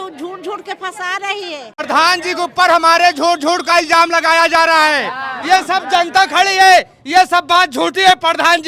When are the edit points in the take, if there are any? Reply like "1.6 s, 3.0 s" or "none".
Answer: 1.7 s